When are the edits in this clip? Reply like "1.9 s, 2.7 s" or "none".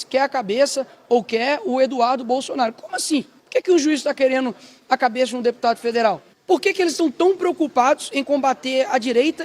3.4 s, 6.3 s